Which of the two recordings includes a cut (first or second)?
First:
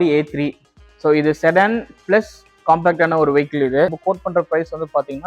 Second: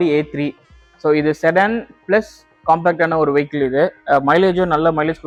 first